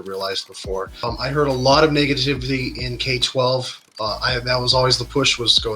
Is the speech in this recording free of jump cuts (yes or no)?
no